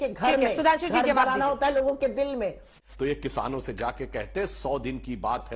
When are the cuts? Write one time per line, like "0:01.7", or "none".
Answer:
0:02.7